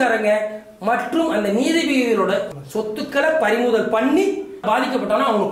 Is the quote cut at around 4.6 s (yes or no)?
yes